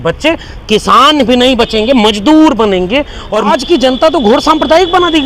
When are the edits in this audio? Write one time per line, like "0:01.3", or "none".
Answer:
0:03.5